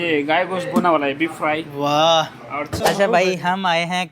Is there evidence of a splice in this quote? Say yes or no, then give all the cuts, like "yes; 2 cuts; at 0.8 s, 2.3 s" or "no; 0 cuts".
yes; 1 cut; at 2.7 s